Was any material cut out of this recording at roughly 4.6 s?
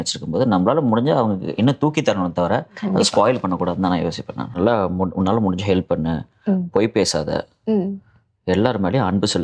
yes; 1 cut; at 4.6 s

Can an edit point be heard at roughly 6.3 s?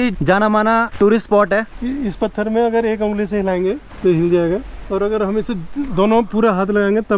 no; 4 cuts; at 0.9 s, 1.7 s, 3.9 s, 4.8 s

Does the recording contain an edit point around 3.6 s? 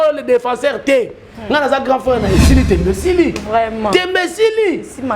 no; 1 cut; at 2.3 s

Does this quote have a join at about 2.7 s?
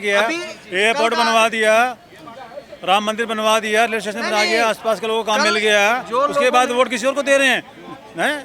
no; 0 cuts

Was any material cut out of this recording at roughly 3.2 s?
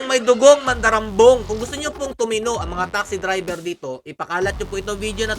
no; 1 cut; at 1.5 s

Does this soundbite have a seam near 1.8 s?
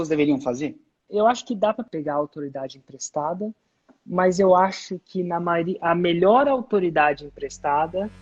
yes; 2 cuts; at 1.0 s, 1.8 s

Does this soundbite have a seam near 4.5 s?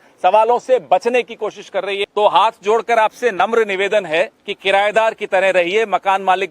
yes; 2 cuts; at 2.0 s, 4.5 s

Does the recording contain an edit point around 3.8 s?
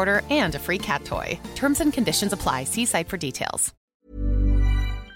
yes; 1 cut; at 3.8 s

